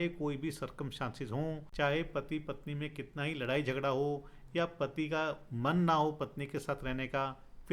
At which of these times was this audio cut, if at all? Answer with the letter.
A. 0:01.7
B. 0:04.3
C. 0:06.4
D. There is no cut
A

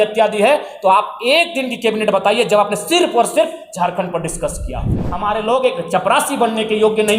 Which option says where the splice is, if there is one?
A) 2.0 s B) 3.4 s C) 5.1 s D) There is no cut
C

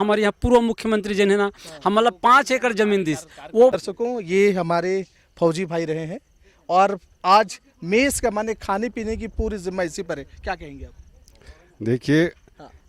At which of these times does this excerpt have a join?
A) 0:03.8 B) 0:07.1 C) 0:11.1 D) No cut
A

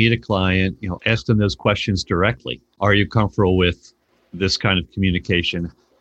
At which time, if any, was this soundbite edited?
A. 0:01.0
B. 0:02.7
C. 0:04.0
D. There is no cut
B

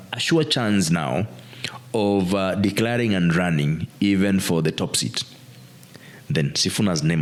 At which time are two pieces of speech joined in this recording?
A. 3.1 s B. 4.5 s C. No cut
C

